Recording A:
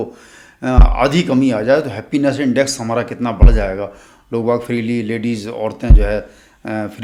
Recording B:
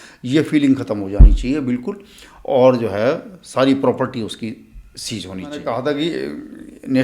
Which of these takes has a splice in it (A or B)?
B